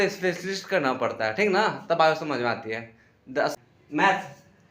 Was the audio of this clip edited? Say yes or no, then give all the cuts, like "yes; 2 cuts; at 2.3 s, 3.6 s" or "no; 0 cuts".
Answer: yes; 1 cut; at 3.5 s